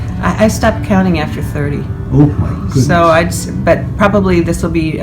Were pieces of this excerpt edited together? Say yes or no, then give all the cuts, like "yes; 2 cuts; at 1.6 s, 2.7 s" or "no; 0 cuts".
no; 0 cuts